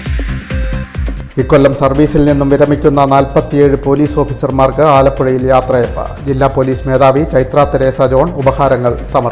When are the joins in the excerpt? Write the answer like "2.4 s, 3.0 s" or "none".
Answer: 1.2 s

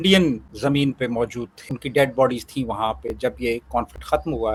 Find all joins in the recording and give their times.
none

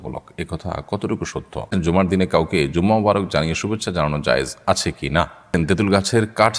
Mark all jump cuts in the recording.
1.7 s, 5.5 s

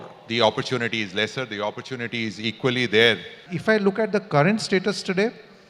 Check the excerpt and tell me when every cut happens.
3.4 s

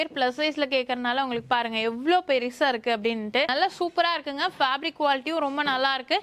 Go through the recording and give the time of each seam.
none

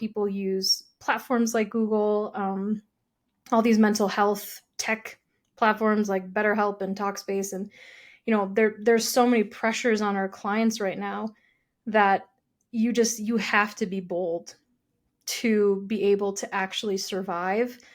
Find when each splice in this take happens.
none

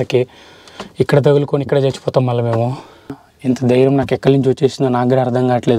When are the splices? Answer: 3.3 s

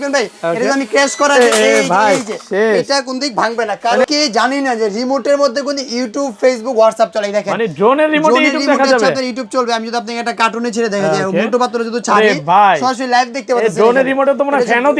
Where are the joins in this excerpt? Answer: 4.1 s

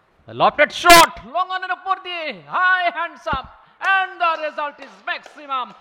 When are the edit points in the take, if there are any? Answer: none

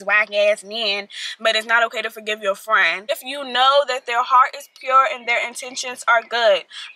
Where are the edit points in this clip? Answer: 3.1 s

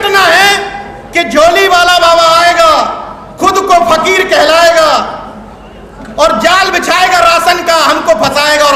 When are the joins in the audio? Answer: none

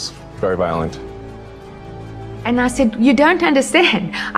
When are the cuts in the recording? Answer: 2.3 s

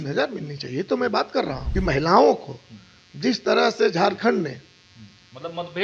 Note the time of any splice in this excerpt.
1.6 s

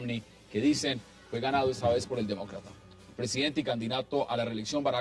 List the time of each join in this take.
1.1 s

